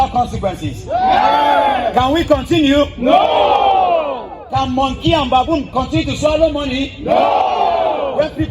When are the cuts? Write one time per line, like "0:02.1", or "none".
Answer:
none